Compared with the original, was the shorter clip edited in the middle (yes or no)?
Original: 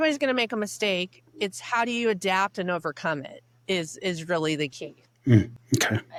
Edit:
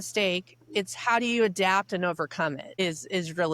yes